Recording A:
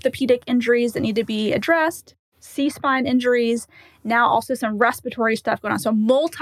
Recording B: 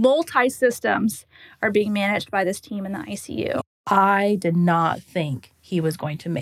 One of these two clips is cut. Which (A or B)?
B